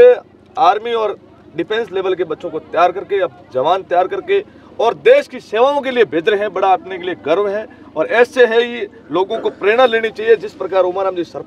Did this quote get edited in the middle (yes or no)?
no